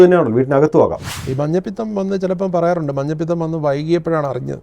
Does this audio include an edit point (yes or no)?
yes